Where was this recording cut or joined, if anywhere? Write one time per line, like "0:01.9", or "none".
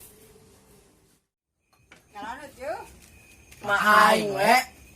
0:01.1